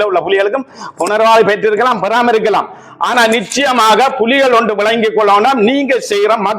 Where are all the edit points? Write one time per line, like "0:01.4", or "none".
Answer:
none

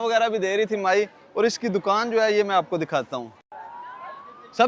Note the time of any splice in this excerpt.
none

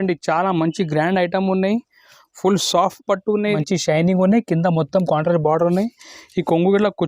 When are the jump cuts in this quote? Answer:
0:03.6

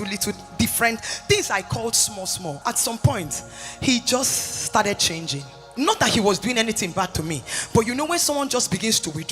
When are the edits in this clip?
0:02.6
0:05.7

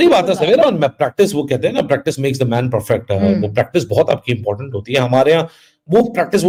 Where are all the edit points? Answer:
none

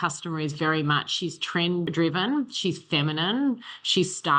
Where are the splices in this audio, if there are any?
0:01.9

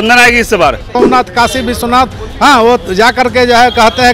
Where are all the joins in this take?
0:00.9

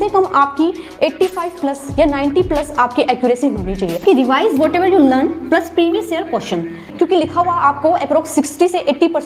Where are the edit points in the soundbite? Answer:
0:04.0
0:06.9

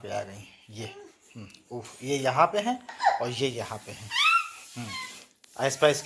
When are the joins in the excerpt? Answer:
none

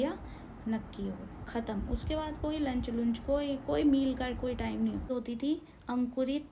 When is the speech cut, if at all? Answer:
0:05.1

